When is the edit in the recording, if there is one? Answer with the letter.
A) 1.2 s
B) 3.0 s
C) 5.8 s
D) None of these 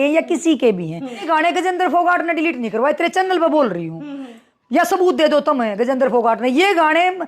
A